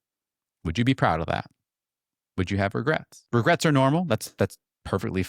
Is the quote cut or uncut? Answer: cut